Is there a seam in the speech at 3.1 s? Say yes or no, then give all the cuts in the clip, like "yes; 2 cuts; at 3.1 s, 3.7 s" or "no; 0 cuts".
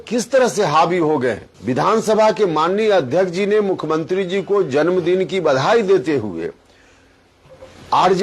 no; 1 cut; at 1.5 s